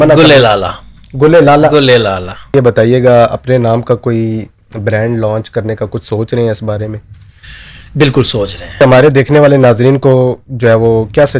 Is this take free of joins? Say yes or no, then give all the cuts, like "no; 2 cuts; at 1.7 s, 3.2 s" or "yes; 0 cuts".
no; 2 cuts; at 2.5 s, 8.8 s